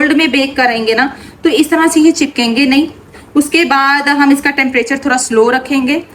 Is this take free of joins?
yes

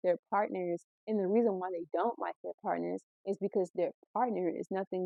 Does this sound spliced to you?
no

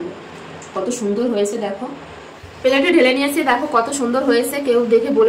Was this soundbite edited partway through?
no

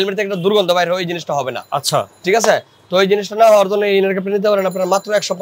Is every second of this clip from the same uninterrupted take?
yes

